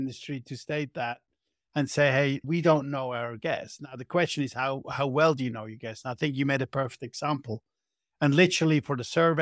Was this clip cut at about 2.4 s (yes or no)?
yes